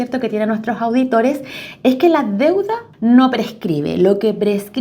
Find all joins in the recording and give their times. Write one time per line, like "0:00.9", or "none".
0:02.8